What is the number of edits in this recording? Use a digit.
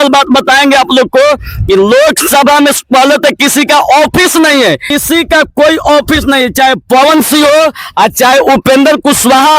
1